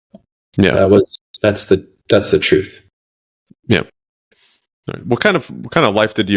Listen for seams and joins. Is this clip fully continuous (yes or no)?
yes